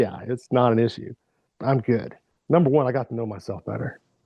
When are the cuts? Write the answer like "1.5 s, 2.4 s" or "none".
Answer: 1.9 s